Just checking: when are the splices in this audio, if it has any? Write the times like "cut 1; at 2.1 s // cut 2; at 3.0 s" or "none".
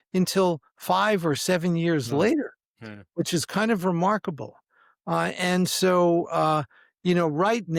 none